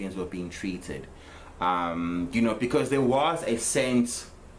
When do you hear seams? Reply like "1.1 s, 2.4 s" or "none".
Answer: none